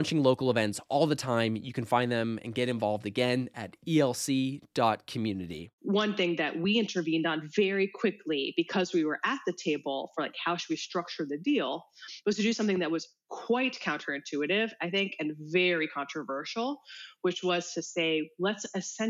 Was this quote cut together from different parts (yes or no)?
yes